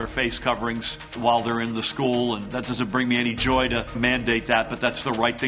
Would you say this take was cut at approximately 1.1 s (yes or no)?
yes